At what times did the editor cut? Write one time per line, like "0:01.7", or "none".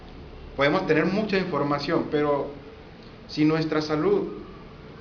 0:01.1